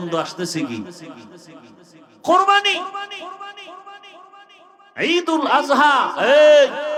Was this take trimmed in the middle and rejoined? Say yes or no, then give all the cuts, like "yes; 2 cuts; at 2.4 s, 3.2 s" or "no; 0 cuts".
no; 0 cuts